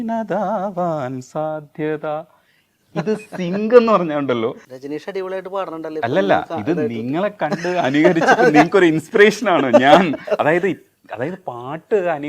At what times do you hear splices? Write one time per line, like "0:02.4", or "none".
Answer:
none